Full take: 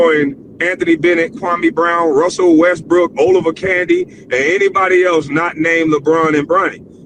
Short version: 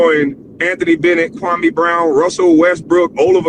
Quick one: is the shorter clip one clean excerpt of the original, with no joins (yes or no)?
yes